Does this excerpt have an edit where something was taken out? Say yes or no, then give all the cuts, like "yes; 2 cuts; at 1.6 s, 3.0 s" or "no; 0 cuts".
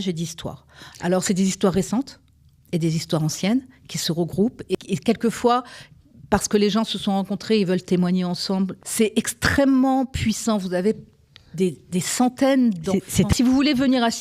yes; 3 cuts; at 4.7 s, 8.8 s, 13.3 s